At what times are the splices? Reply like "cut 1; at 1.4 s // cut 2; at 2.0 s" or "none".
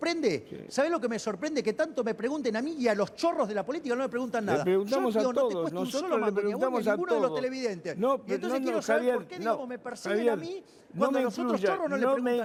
none